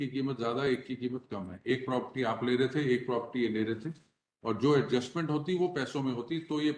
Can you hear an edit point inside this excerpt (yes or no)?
no